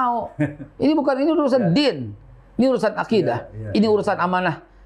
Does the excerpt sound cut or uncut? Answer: uncut